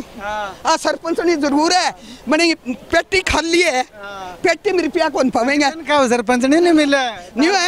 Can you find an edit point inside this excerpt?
no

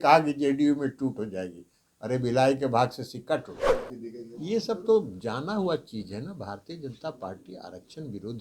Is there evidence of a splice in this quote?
yes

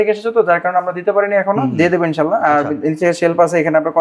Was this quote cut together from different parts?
no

